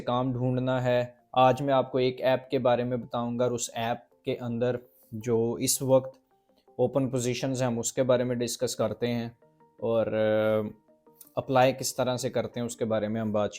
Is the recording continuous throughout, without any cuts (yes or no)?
yes